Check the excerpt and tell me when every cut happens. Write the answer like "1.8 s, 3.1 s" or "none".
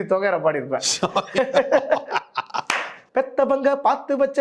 3.0 s